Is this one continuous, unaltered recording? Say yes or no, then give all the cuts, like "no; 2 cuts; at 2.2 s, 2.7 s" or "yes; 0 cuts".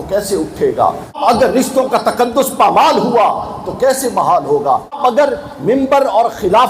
no; 2 cuts; at 1.2 s, 5.0 s